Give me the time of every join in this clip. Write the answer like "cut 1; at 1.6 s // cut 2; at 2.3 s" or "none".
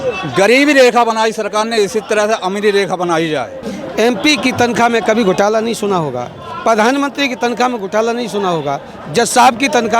cut 1; at 3.6 s